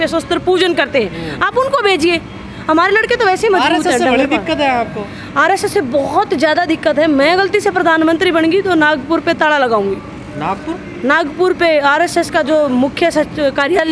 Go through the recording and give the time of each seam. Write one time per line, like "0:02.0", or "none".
none

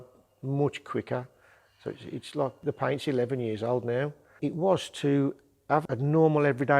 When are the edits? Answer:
0:02.6
0:04.2
0:05.9

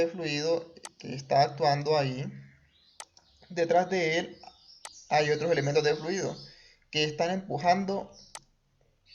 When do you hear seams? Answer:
none

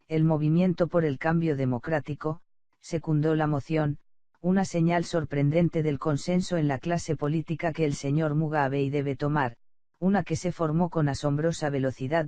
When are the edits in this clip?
0:05.2

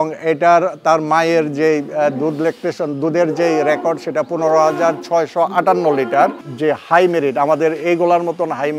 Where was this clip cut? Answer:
0:06.5

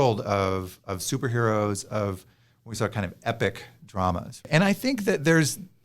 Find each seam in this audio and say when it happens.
0:04.5

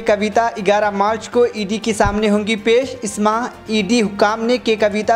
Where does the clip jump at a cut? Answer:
none

